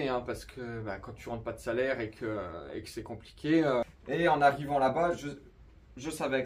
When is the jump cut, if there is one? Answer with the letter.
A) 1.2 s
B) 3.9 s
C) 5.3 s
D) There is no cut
B